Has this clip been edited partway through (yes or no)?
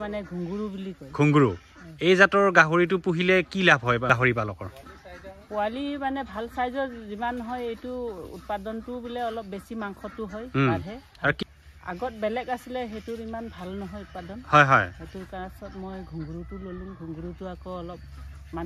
yes